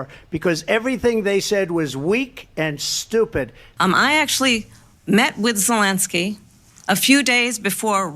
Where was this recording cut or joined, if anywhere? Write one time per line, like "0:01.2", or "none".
0:03.7